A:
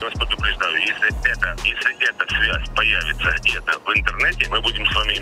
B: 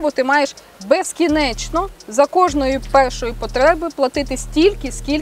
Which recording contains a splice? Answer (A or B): A